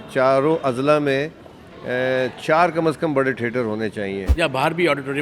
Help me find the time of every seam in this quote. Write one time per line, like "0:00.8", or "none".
0:04.3